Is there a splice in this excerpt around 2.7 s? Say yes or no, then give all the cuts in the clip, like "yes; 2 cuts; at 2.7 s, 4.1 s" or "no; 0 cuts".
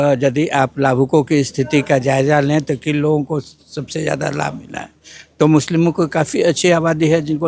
no; 0 cuts